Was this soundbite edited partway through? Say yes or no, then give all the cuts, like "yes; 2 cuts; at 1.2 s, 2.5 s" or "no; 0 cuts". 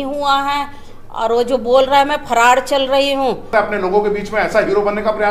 yes; 1 cut; at 3.5 s